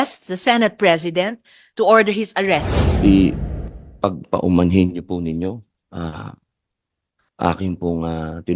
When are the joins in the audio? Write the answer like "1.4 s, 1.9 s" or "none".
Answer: 2.8 s

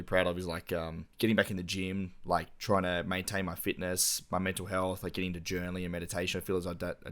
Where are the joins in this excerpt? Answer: 1.0 s

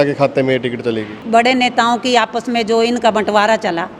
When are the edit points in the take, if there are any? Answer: 1.2 s

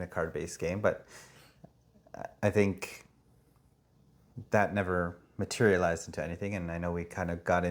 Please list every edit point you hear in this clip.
none

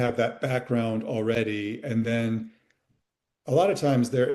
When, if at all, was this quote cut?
none

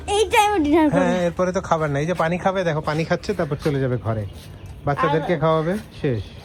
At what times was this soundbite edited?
none

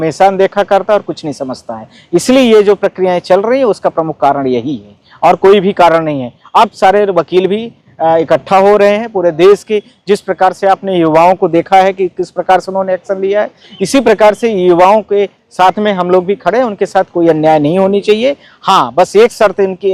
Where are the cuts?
none

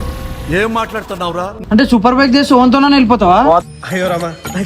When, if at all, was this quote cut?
1.6 s

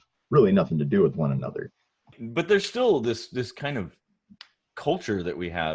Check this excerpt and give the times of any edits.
2.2 s

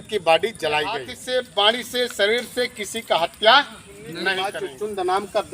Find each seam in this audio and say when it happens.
1.1 s, 4.3 s

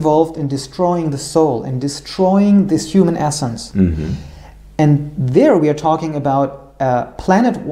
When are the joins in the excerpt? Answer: none

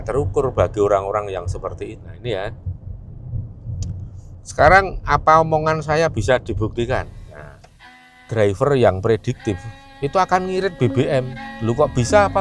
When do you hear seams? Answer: 8.0 s

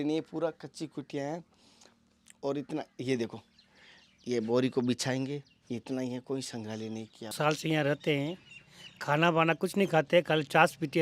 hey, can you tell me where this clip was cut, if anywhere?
7.3 s

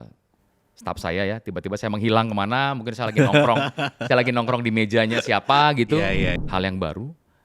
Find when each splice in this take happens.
6.4 s

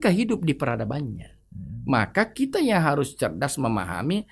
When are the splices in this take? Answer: none

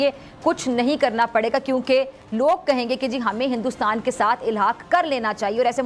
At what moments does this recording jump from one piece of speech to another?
none

